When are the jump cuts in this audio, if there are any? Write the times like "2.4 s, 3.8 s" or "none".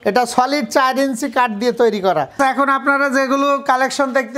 2.3 s